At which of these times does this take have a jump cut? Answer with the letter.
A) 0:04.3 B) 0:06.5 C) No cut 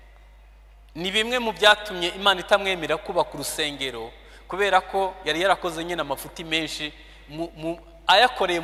C